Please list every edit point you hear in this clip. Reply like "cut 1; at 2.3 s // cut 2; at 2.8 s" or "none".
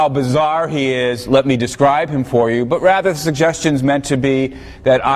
none